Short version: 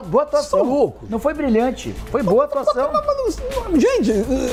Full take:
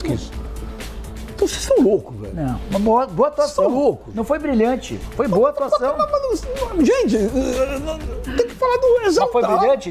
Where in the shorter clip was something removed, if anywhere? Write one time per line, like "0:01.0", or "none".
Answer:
none